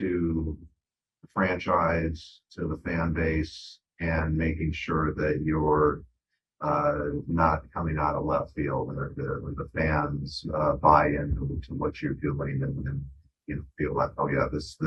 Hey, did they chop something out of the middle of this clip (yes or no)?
no